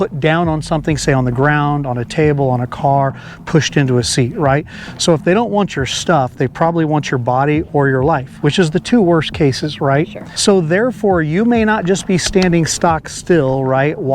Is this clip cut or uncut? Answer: cut